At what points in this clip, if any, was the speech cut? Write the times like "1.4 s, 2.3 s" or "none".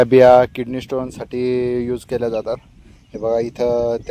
none